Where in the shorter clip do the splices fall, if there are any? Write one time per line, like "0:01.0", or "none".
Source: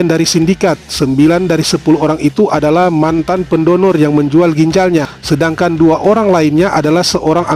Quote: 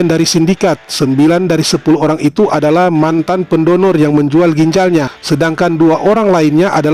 none